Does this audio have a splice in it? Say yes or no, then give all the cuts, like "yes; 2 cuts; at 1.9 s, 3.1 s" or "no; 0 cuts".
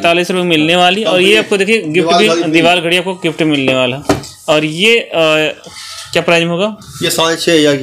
no; 0 cuts